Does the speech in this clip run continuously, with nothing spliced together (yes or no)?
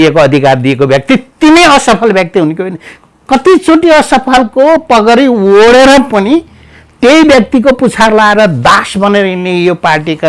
yes